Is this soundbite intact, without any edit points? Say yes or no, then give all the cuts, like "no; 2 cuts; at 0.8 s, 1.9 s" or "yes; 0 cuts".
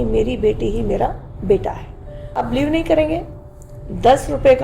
no; 1 cut; at 2.4 s